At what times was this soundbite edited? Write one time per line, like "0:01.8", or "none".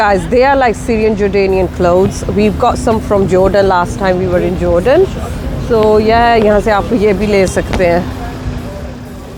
none